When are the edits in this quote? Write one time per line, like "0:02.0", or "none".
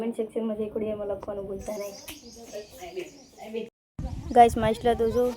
0:03.8